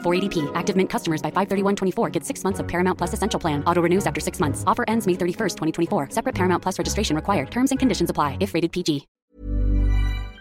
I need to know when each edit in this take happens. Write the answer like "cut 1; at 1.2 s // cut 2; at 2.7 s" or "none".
cut 1; at 9.1 s